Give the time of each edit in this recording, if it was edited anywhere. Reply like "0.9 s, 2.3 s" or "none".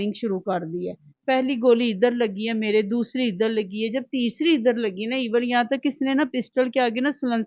none